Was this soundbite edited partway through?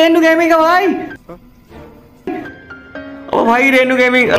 no; 0 cuts

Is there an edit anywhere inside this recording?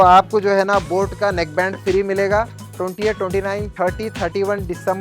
yes; 2 cuts; at 2.7 s, 3.7 s

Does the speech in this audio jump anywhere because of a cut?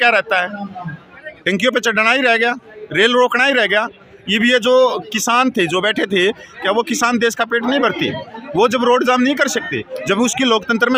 no; 0 cuts

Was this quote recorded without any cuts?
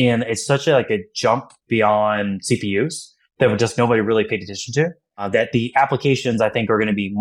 no; 1 cut; at 5.2 s

